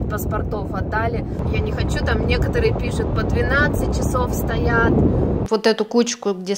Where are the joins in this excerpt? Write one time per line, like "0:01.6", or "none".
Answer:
0:01.4
0:05.4